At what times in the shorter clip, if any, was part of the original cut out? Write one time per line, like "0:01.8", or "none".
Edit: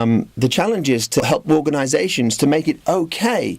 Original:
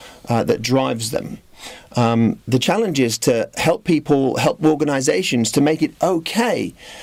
0:01.2